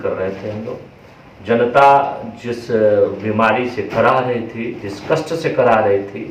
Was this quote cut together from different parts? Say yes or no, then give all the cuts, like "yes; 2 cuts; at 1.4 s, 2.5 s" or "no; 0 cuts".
no; 0 cuts